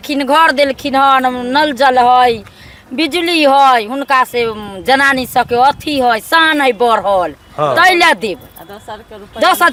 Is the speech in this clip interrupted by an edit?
no; 0 cuts

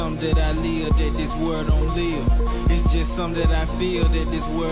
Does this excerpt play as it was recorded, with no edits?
yes; 0 cuts

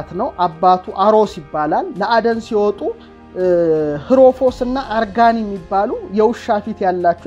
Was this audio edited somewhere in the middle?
no; 0 cuts

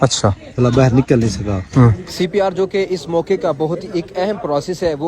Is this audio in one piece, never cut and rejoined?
no; 1 cut; at 2.0 s

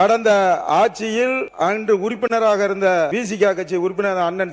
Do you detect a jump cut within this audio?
yes; 2 cuts; at 1.5 s, 3.1 s

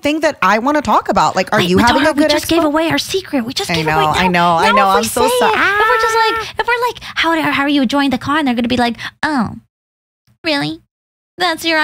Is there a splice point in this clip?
no; 0 cuts

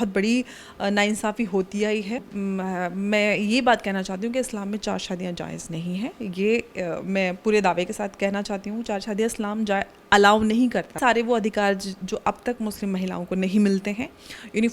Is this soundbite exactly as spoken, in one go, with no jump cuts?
no; 2 cuts; at 2.2 s, 11.0 s

